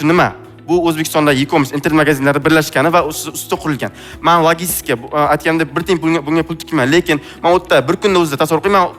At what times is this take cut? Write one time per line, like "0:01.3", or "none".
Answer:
none